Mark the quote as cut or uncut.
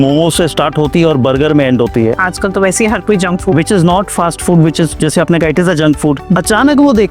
cut